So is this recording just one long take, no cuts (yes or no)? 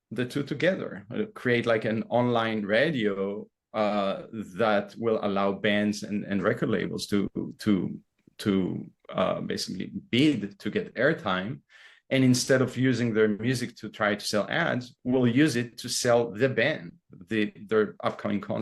yes